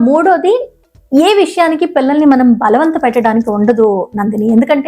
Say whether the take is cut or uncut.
uncut